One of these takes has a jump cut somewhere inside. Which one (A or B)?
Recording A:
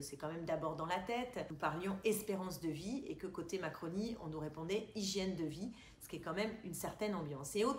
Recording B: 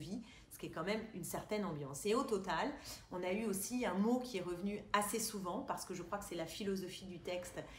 A